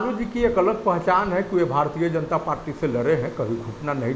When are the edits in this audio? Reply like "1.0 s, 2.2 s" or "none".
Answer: none